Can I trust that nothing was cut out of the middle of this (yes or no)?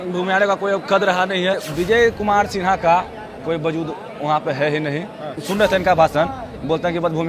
no